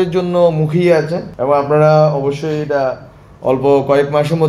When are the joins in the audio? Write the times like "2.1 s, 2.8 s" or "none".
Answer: 1.2 s